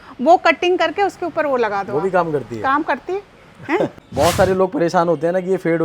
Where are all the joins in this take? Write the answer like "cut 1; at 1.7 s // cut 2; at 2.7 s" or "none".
cut 1; at 4.0 s